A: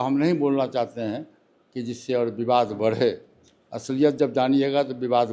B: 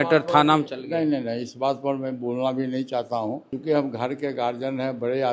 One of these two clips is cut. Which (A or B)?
B